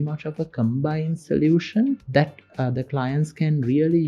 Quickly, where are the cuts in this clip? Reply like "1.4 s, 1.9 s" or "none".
2.0 s